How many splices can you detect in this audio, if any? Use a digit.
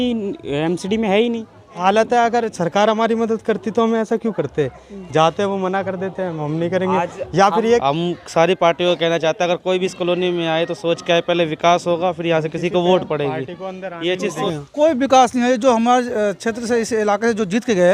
3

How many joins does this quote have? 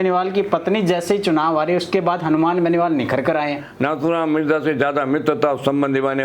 1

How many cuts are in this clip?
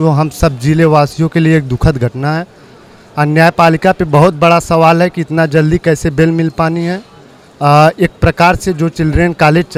0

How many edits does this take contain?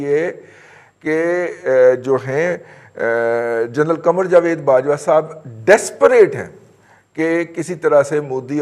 0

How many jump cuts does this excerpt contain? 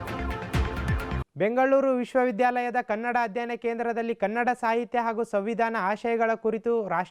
1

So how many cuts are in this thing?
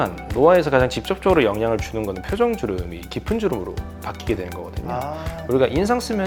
0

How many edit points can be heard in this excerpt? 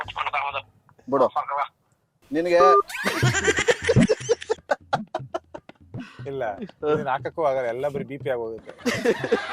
0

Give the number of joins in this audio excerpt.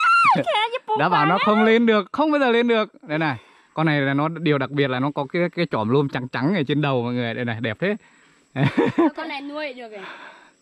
0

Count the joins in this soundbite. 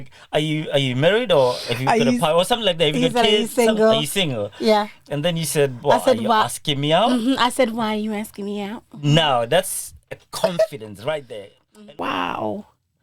1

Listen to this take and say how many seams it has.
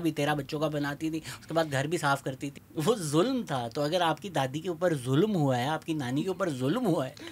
1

